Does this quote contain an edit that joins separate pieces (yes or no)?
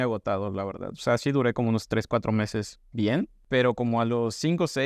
no